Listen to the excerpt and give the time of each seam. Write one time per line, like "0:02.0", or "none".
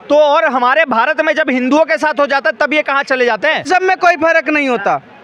0:03.7